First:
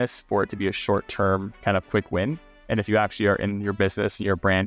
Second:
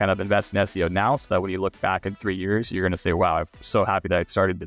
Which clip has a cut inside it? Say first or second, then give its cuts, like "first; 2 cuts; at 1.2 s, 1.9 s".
first; 1 cut; at 1.5 s